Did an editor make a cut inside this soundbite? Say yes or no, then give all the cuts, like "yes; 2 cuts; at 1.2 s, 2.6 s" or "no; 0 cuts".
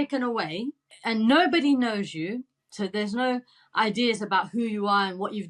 yes; 1 cut; at 0.9 s